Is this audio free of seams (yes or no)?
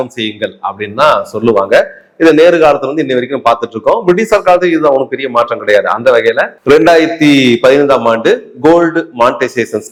yes